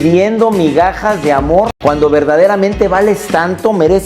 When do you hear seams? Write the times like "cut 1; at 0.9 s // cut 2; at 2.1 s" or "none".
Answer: cut 1; at 1.7 s